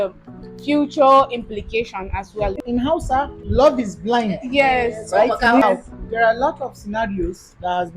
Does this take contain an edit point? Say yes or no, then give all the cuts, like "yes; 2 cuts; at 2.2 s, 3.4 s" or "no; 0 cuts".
yes; 1 cut; at 2.6 s